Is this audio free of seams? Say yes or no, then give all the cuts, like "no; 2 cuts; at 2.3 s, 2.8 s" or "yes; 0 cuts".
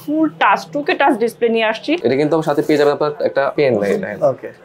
no; 2 cuts; at 1.9 s, 3.5 s